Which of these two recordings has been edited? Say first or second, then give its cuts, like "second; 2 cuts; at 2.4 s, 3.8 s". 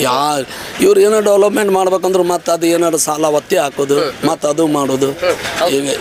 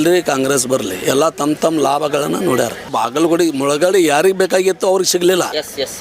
second; 1 cut; at 2.9 s